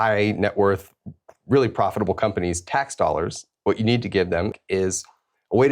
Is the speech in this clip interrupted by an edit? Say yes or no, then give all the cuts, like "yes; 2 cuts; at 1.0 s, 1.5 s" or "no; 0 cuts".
yes; 1 cut; at 4.6 s